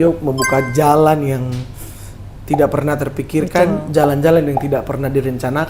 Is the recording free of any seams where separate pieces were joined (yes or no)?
yes